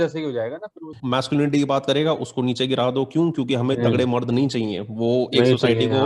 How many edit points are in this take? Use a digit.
1